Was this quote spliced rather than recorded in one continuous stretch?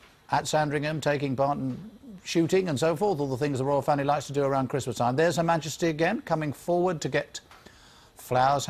no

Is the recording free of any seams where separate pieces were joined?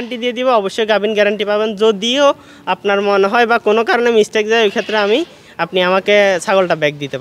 yes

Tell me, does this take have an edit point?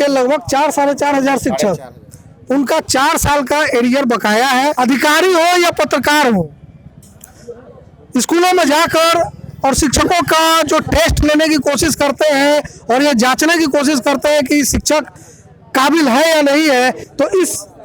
yes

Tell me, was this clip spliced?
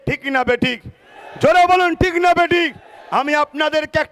no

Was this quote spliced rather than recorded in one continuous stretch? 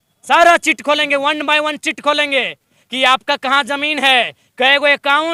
no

